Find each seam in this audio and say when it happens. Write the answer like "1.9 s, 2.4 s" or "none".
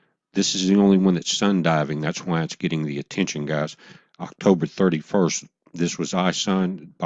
5.7 s